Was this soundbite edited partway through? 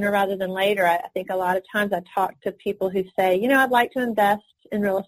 no; 0 cuts

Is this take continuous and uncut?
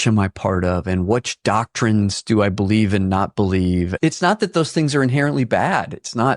no; 1 cut; at 3.9 s

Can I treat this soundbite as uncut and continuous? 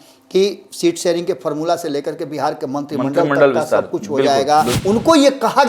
no; 1 cut; at 4.8 s

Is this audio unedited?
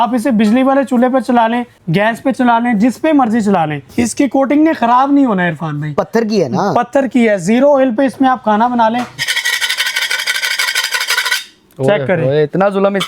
no; 3 cuts; at 1.7 s, 3.8 s, 9.2 s

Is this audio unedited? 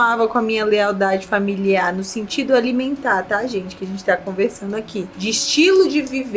no; 1 cut; at 5.1 s

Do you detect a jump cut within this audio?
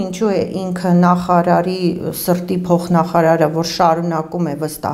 no; 0 cuts

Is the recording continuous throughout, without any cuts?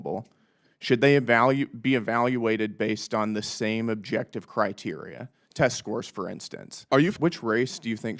no; 1 cut; at 7.1 s

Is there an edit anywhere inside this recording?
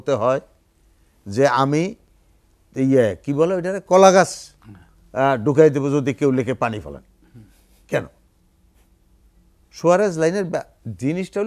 no; 0 cuts

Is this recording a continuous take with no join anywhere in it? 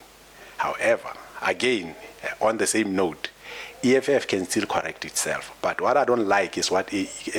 yes; 0 cuts

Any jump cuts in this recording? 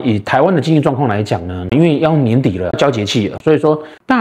no; 0 cuts

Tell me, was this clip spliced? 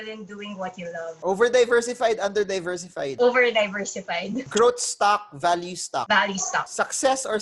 yes; 1 cut; at 1.1 s

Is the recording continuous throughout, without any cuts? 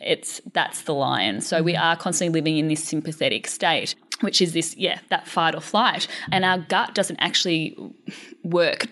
no; 2 cuts; at 4.0 s, 6.2 s

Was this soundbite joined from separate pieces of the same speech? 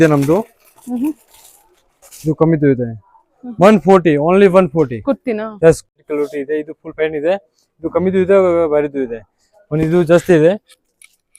yes; 1 cut; at 5.9 s

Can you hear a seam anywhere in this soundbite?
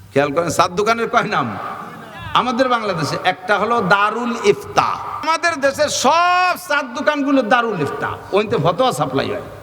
yes; 1 cut; at 5.2 s

